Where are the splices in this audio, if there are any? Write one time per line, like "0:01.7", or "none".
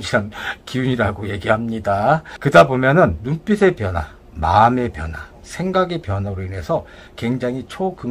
0:02.3